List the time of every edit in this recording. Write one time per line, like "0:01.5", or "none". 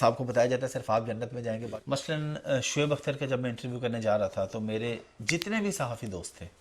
0:01.6